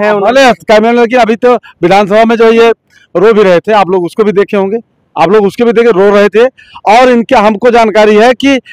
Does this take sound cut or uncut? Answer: uncut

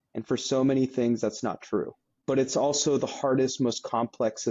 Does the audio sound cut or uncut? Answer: cut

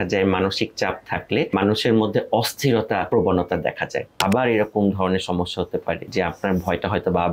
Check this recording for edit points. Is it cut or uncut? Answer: cut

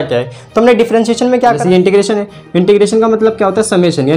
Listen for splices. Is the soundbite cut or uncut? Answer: cut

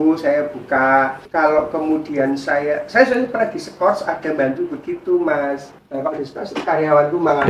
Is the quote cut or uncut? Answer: cut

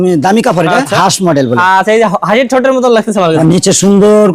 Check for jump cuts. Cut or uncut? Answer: cut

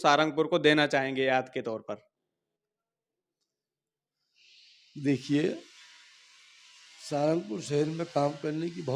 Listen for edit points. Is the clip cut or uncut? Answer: uncut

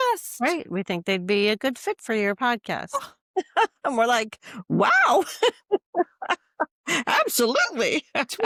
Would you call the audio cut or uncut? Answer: uncut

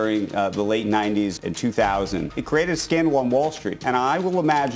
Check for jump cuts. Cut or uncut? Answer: cut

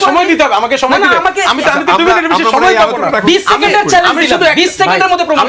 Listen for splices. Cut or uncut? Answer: uncut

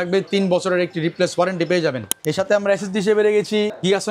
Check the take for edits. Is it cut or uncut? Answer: cut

